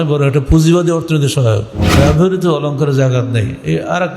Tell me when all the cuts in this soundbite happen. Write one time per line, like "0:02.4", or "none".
0:01.9

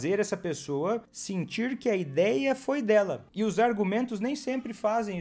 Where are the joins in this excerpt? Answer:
0:01.2
0:03.2

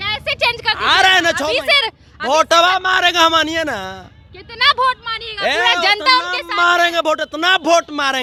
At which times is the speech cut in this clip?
none

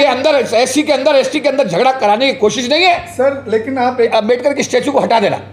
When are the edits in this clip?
0:04.1

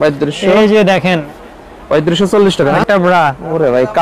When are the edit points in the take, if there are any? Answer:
0:02.8

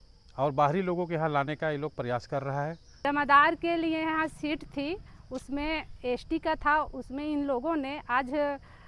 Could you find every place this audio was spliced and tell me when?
0:03.0

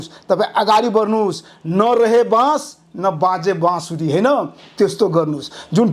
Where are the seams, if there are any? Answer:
none

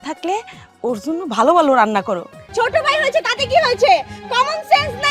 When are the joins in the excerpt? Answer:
0:02.4

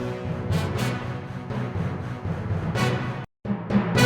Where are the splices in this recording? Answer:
0:02.8

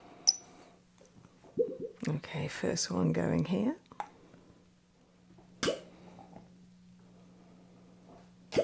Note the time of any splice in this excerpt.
none

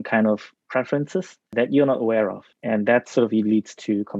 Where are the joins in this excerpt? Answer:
0:01.5
0:02.5

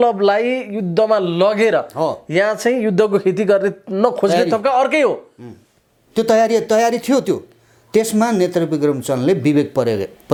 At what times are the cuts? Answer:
none

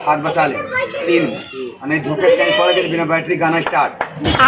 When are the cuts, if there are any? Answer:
none

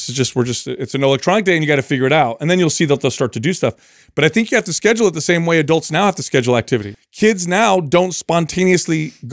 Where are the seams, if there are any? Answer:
0:07.0

